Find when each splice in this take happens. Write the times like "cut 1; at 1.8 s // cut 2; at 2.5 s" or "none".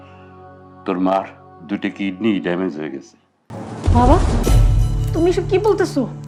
none